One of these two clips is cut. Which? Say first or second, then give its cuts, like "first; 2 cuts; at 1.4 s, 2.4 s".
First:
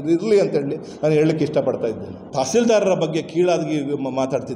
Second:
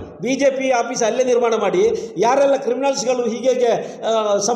first; 1 cut; at 2.2 s